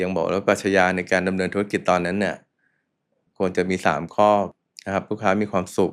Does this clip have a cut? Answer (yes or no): no